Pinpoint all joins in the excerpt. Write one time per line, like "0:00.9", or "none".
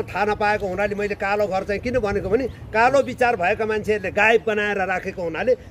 none